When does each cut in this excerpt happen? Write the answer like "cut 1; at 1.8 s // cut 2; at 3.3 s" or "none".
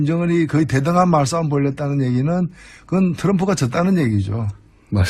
cut 1; at 2.6 s